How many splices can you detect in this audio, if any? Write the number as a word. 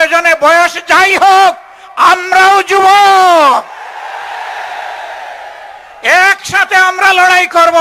zero